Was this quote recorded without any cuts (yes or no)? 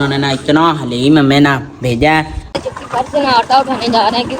no